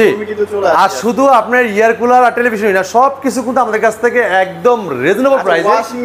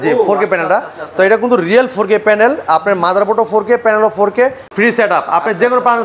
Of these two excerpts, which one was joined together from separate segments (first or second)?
second